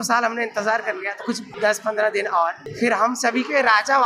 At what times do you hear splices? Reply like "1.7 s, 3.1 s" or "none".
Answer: 1.5 s, 2.6 s